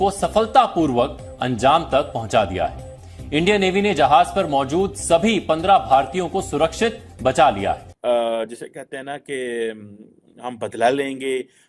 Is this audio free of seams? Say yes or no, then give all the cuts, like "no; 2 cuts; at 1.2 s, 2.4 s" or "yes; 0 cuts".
no; 1 cut; at 7.9 s